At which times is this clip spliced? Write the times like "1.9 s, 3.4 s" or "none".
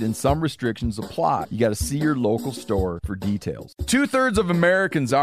1.5 s, 3.2 s